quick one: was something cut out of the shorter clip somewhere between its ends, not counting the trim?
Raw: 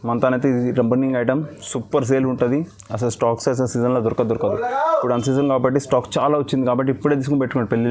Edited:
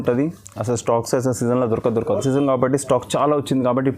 yes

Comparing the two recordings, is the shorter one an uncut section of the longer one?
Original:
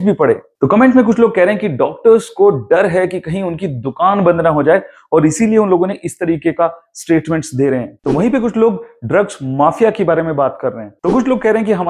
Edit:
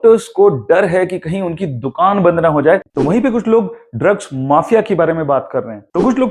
no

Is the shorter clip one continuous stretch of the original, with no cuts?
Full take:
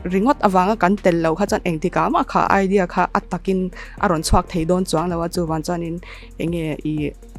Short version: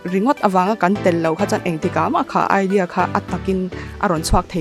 yes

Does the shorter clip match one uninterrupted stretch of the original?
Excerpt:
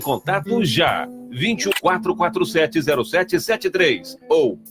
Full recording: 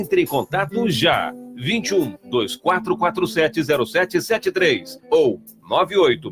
no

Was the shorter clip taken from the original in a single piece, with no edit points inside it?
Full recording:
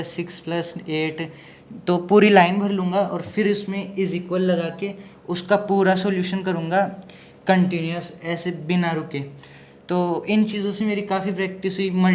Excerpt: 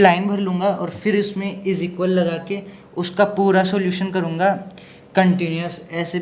yes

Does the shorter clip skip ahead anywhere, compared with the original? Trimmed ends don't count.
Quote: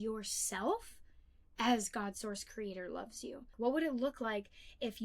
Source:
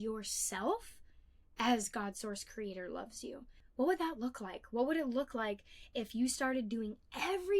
yes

